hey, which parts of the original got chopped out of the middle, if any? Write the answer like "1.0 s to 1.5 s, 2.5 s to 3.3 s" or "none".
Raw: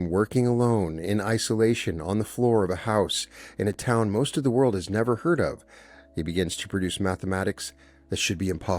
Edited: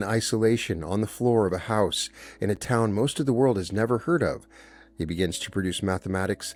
none